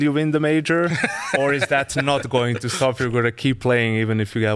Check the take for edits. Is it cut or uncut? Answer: uncut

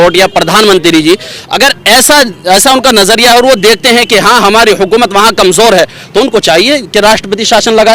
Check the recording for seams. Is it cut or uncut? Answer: uncut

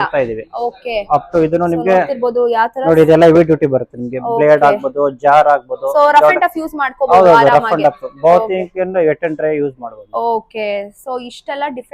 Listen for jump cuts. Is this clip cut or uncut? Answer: uncut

